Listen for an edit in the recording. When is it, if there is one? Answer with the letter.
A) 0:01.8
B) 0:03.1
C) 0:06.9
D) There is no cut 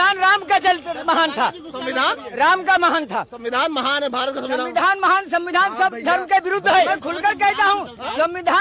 C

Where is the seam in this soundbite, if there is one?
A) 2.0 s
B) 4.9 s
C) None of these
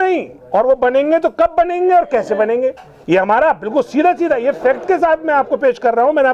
C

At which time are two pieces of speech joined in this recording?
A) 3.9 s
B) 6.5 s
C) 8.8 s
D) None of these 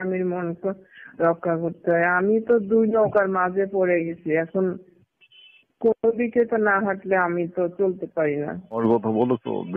C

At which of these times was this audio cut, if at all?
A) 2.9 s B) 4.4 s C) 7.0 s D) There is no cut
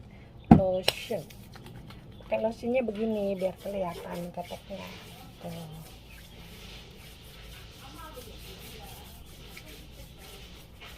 D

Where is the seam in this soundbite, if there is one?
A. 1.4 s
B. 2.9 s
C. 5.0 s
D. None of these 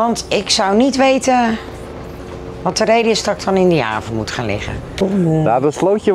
C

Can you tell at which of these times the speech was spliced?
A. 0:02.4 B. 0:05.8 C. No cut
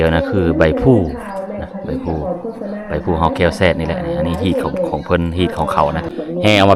B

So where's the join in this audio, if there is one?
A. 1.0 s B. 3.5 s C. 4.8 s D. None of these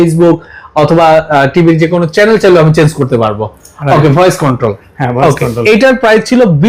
D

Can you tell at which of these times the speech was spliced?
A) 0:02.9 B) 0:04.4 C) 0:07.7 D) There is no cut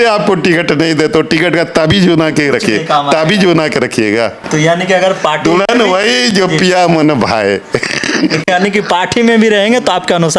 B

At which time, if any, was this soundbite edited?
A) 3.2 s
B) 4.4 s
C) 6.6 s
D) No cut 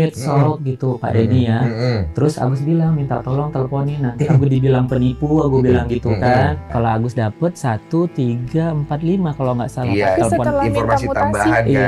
C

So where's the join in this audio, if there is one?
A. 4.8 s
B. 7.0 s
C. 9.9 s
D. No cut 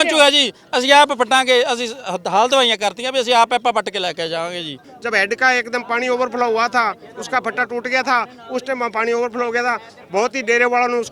A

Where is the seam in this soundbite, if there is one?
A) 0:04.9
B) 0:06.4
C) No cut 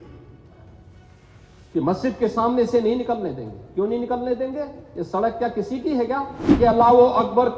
B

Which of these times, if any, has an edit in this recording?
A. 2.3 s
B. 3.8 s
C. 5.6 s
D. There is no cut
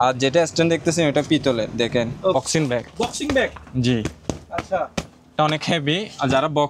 A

